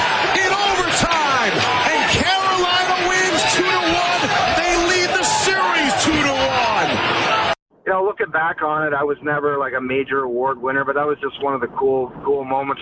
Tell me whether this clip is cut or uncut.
cut